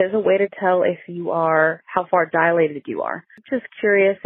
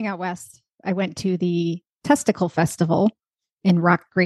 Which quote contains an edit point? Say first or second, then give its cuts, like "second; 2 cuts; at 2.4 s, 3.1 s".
first; 1 cut; at 3.3 s